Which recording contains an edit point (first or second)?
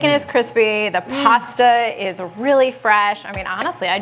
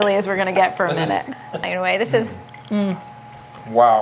second